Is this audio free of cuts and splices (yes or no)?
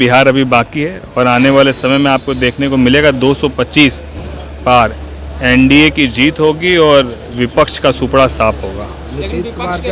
yes